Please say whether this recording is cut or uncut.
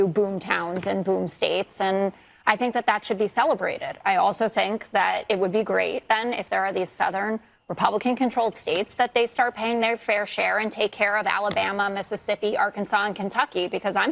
uncut